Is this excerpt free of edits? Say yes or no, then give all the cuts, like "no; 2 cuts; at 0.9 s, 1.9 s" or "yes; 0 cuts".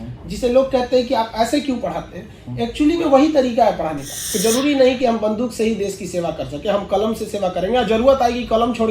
no; 1 cut; at 4.3 s